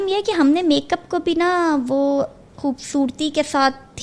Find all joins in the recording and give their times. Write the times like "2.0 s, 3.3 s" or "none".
none